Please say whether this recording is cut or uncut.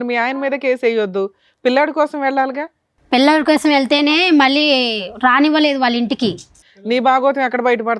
cut